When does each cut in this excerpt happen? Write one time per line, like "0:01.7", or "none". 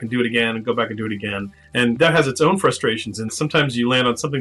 0:01.8
0:03.3